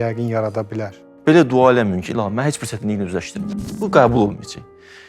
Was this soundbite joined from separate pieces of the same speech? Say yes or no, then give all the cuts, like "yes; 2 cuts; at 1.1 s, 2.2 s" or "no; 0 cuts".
yes; 2 cuts; at 1.0 s, 3.8 s